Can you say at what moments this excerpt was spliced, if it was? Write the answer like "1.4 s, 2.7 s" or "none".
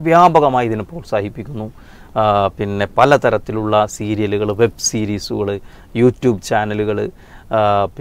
none